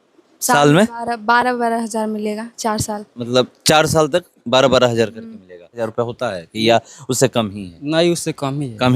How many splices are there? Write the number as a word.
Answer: one